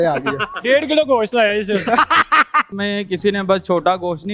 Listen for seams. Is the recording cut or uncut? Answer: cut